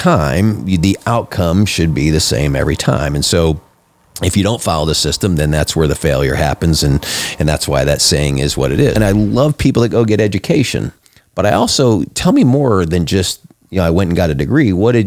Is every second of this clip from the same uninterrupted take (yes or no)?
no